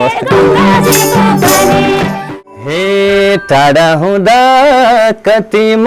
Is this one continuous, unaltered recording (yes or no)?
no